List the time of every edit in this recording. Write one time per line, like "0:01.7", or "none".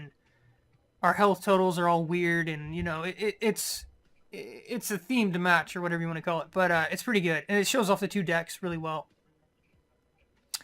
0:02.0

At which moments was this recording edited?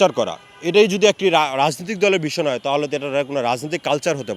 none

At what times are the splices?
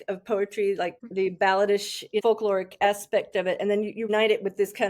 0:01.0
0:02.2
0:04.1

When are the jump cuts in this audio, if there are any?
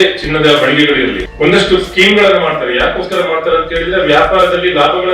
0:01.2

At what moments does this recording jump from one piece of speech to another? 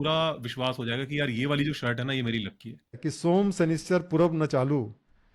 0:03.0

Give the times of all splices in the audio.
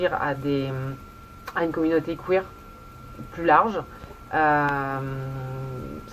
none

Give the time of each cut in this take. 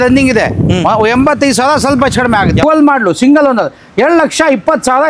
0:02.6

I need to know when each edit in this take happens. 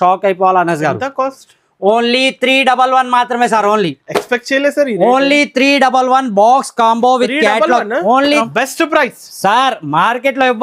0:08.4

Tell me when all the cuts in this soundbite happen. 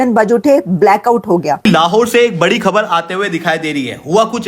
0:01.6

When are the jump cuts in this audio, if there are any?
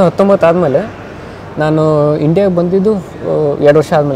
none

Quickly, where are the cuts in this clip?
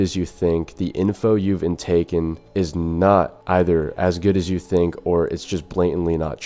0:02.4
0:03.4

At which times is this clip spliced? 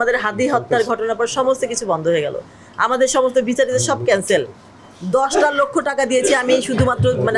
none

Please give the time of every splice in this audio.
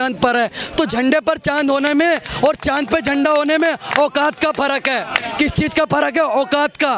none

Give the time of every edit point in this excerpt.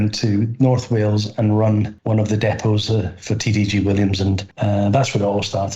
0:02.0
0:04.5

